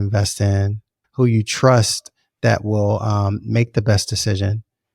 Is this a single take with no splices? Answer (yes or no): no